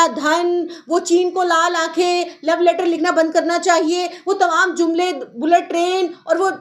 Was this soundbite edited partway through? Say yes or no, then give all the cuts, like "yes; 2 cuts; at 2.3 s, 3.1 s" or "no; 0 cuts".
no; 0 cuts